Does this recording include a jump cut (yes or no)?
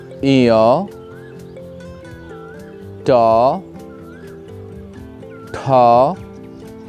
no